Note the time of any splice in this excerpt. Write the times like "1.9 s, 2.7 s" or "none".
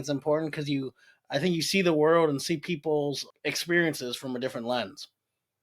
3.3 s